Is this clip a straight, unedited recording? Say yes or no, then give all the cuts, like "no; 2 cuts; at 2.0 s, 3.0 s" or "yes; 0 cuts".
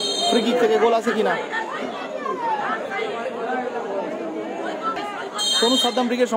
no; 1 cut; at 5.0 s